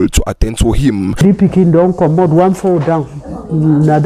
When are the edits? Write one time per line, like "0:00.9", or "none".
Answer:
0:01.2

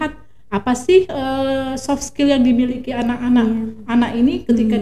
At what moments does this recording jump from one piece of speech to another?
none

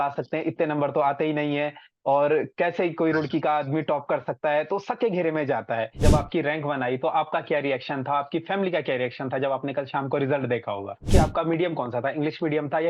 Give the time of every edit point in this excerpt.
0:06.0
0:11.1

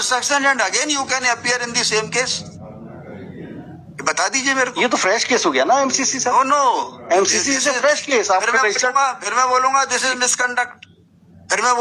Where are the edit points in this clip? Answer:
none

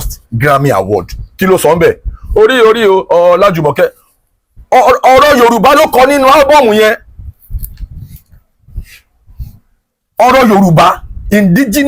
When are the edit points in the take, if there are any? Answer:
none

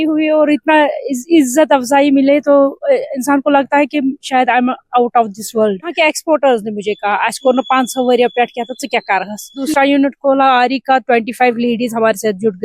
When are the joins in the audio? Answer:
0:05.9
0:09.7

